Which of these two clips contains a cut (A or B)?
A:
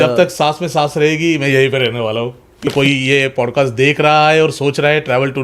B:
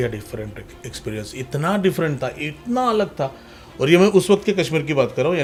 A